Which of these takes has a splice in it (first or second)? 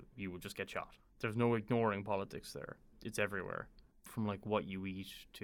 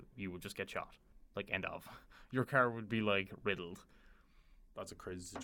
first